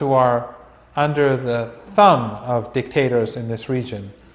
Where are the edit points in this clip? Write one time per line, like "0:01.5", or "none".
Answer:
0:01.8